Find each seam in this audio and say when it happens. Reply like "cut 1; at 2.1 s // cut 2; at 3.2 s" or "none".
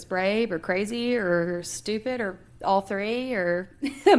none

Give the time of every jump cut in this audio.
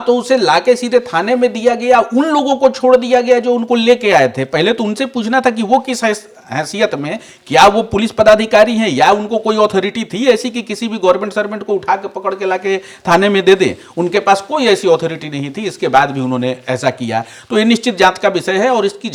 none

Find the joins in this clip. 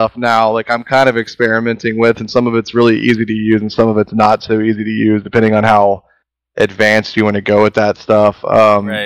none

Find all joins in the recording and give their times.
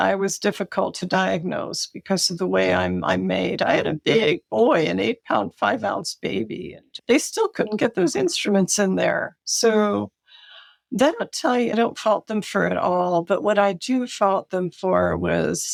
none

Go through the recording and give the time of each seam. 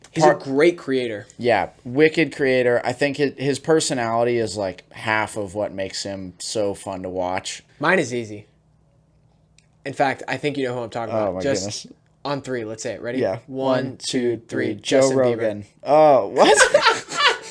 cut 1; at 7.6 s

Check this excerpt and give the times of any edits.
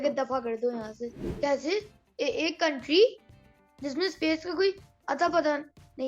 cut 1; at 1.2 s

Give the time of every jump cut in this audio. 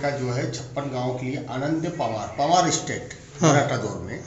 none

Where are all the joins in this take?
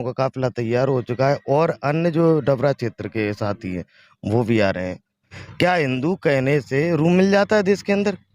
cut 1; at 5.3 s

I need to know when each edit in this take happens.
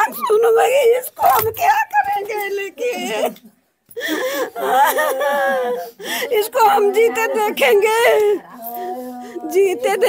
none

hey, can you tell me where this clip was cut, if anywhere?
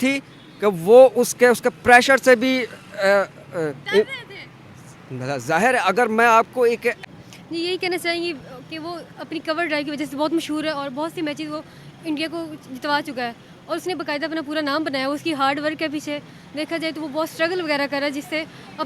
cut 1; at 7.0 s

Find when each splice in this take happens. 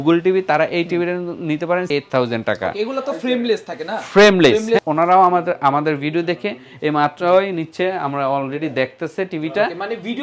cut 1; at 1.9 s // cut 2; at 4.8 s

